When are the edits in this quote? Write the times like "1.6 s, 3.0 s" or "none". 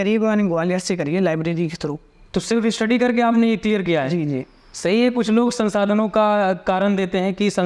none